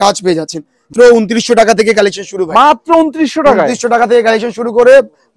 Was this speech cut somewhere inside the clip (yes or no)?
yes